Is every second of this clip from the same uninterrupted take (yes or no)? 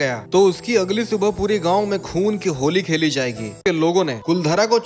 no